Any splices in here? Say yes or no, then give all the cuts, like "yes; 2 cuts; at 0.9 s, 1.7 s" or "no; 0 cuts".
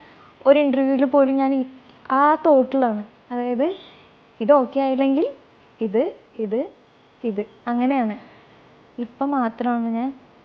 no; 0 cuts